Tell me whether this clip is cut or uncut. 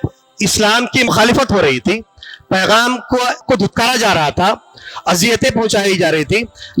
cut